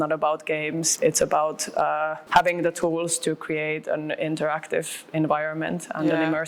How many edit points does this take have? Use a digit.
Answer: 2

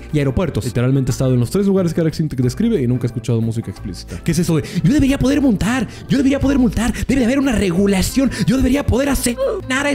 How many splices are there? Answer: 1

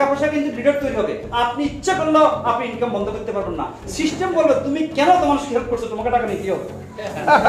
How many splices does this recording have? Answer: 0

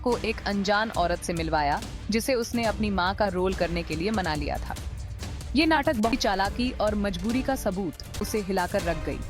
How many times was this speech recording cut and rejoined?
2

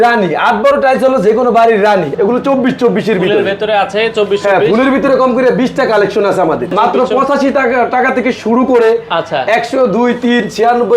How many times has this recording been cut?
2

